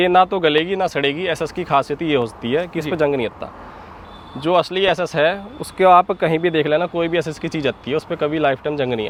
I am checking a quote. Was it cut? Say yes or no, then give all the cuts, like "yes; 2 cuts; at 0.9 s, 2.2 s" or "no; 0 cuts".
no; 0 cuts